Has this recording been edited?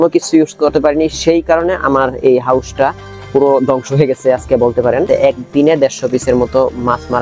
yes; 1 cut; at 5.1 s

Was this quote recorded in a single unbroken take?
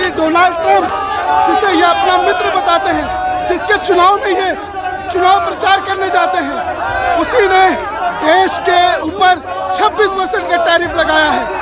yes; 0 cuts

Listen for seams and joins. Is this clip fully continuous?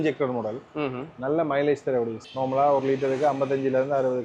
no; 1 cut; at 2.2 s

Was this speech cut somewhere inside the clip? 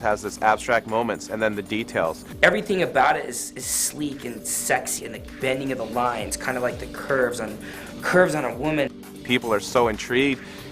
yes; 3 cuts; at 2.3 s, 5.0 s, 9.2 s

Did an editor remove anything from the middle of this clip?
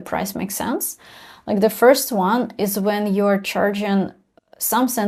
no; 0 cuts

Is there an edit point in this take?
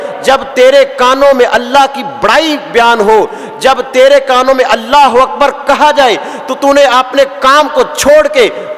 no; 0 cuts

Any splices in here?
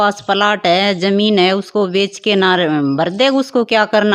no; 0 cuts

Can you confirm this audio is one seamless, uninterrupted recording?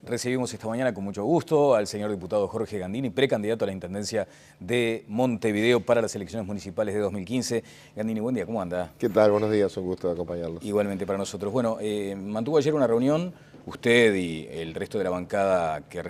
yes; 0 cuts

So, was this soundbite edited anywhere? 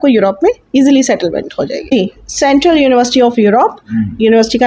yes; 1 cut; at 1.9 s

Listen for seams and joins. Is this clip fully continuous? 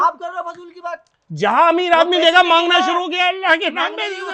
yes; 0 cuts

